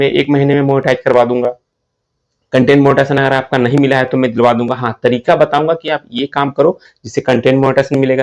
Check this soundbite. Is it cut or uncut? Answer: uncut